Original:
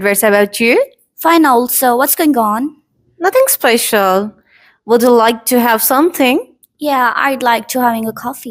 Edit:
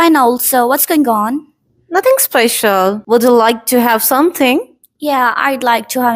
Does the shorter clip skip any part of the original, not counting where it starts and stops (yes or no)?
yes